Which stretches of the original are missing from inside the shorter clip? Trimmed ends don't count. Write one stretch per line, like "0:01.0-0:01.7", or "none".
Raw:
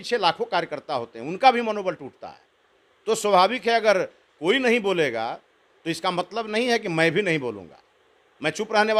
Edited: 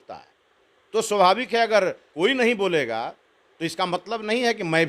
0:04.2-0:04.3